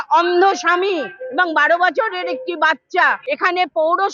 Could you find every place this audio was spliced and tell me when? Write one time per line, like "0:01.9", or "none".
0:03.2